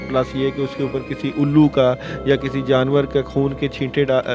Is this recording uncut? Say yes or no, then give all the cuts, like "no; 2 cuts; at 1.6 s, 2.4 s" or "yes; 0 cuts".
yes; 0 cuts